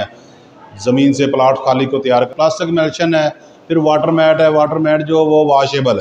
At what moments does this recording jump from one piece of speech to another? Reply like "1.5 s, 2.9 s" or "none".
2.3 s